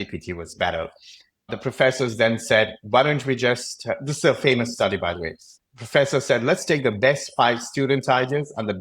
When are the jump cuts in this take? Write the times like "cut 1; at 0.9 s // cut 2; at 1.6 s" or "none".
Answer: cut 1; at 1.5 s